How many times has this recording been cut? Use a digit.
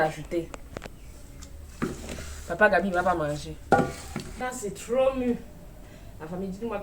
1